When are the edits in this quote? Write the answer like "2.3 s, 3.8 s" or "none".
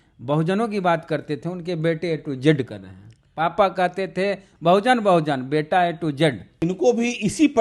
6.6 s